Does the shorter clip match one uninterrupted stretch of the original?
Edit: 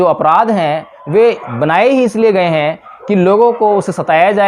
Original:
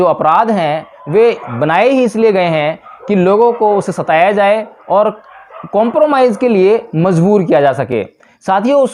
yes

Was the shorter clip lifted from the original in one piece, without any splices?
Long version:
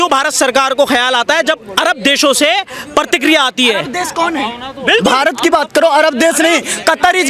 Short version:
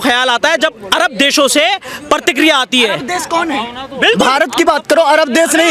yes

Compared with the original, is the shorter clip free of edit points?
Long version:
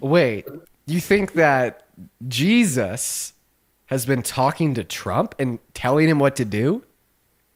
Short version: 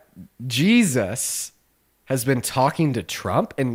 yes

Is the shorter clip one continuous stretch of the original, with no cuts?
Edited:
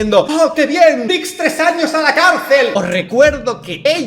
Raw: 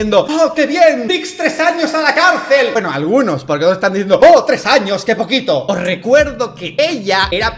no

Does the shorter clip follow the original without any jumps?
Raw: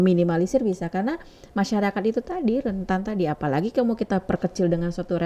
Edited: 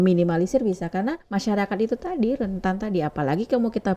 no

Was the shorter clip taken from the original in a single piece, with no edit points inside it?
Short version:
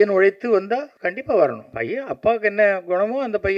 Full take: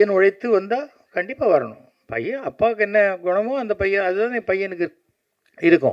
no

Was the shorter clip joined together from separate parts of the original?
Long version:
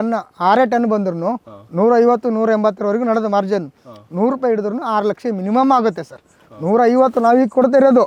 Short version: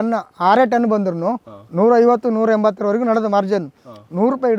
no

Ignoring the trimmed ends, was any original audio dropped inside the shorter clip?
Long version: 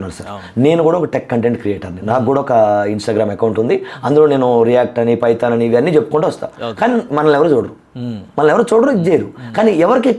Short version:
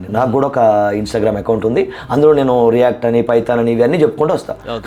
no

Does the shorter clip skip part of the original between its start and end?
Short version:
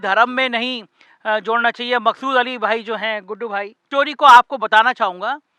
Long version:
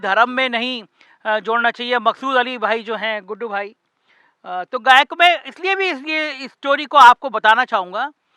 yes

